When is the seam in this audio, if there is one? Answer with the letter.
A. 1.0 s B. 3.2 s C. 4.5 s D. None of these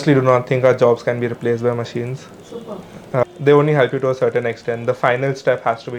B